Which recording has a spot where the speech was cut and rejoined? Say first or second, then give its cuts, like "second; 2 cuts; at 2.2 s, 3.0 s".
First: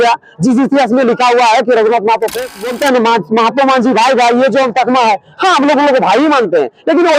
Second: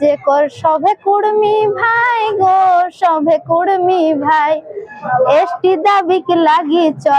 first; 1 cut; at 2.7 s